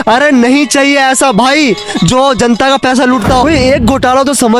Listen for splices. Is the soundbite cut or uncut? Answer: cut